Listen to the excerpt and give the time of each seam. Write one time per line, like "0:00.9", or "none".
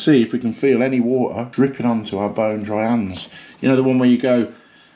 0:01.4